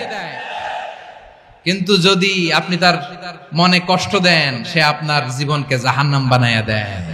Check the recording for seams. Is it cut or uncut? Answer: uncut